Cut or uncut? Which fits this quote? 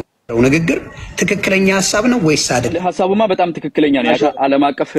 cut